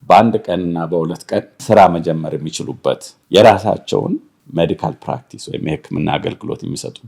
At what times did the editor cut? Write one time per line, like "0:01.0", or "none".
0:01.6
0:03.1
0:04.4